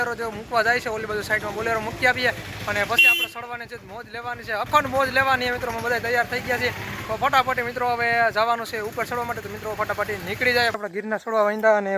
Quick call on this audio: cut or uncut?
cut